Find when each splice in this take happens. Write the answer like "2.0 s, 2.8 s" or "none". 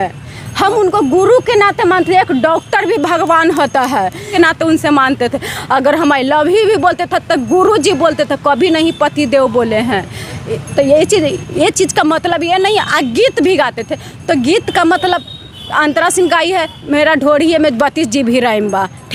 none